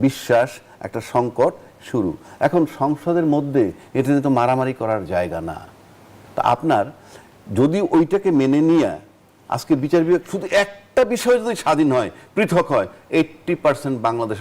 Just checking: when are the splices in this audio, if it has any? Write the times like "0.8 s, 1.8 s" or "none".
none